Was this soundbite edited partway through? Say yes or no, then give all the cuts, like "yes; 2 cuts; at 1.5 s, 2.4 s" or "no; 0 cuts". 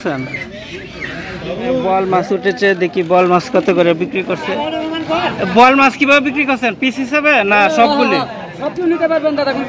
yes; 1 cut; at 1.8 s